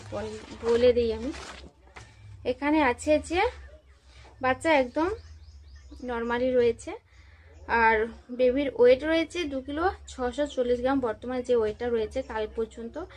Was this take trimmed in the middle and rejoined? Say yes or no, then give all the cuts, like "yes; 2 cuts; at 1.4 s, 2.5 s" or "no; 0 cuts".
no; 0 cuts